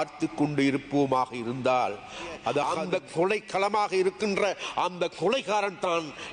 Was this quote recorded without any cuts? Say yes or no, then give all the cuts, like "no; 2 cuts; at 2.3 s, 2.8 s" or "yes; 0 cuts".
no; 1 cut; at 2.7 s